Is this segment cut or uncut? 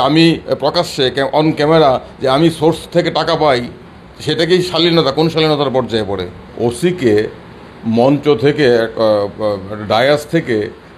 cut